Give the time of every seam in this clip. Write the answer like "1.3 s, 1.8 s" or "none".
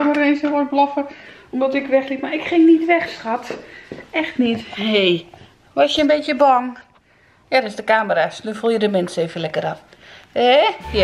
none

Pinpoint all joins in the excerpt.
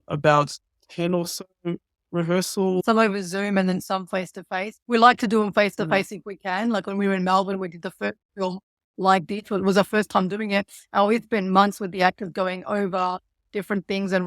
2.8 s, 4.7 s

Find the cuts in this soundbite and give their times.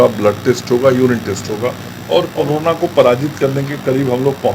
1.9 s

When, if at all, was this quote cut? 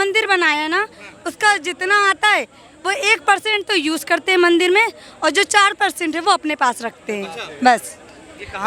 none

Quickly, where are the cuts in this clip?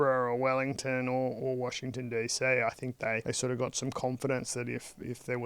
3.2 s

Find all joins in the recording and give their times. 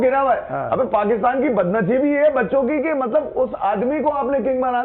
none

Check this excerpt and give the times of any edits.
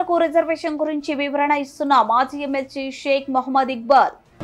none

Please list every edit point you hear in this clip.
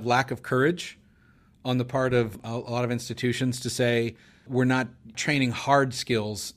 2.4 s, 5.2 s

